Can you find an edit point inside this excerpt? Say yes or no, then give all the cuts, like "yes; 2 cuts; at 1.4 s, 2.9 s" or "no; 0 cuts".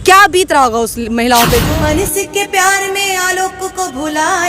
yes; 1 cut; at 1.7 s